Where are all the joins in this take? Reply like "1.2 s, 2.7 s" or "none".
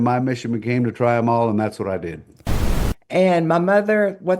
2.6 s